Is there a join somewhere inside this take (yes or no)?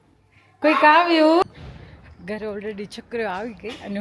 yes